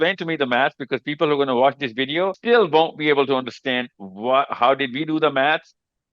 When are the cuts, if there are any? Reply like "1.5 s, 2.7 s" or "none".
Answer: 2.4 s

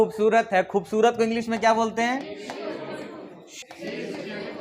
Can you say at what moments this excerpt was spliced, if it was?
3.6 s

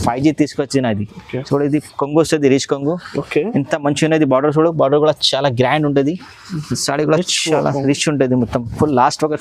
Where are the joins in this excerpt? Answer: none

